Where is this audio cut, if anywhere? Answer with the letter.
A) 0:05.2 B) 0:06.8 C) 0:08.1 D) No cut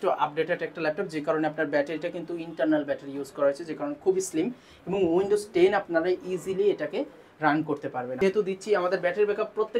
C